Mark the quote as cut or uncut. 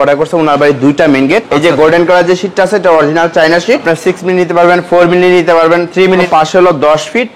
cut